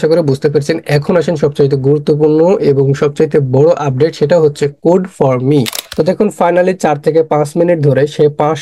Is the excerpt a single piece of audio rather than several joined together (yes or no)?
no